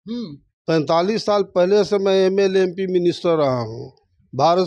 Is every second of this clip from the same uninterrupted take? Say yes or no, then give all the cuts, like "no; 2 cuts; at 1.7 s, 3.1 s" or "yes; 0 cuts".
yes; 0 cuts